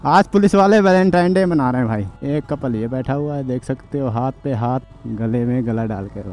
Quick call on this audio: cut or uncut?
cut